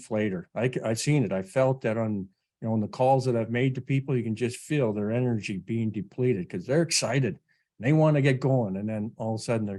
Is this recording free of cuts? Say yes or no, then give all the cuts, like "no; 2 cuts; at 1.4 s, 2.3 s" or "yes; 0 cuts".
yes; 0 cuts